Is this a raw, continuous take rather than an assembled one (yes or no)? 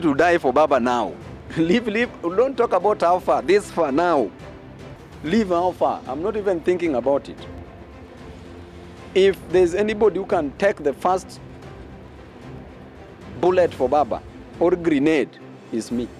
yes